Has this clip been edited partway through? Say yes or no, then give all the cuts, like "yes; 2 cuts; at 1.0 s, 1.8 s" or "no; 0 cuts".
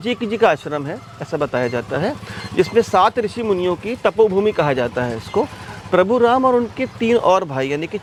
no; 0 cuts